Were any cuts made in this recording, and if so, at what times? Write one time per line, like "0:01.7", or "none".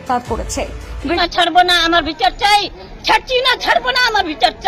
0:01.2